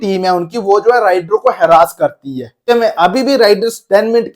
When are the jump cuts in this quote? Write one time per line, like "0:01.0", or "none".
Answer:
0:02.7